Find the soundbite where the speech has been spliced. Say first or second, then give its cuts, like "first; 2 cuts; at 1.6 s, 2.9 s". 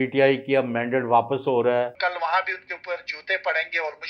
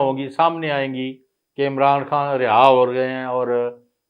first; 1 cut; at 1.9 s